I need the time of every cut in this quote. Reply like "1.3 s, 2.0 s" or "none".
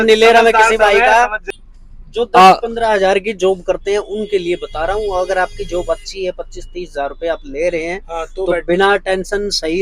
1.4 s